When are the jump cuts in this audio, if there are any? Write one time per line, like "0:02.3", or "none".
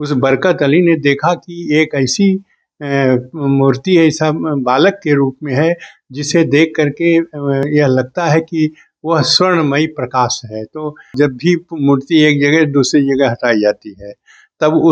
0:11.1